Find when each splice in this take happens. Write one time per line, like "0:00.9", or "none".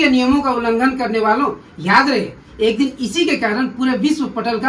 none

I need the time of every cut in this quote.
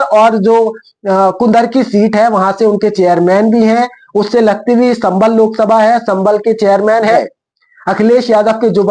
0:07.1

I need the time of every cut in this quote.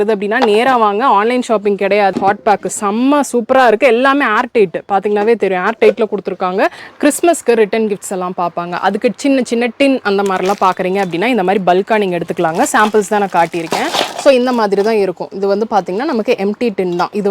0:02.1
0:06.8

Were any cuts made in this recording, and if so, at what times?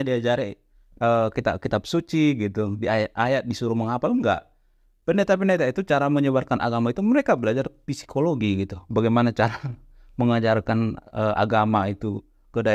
none

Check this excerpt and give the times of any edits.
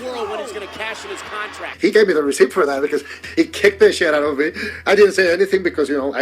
0:01.7
0:03.2

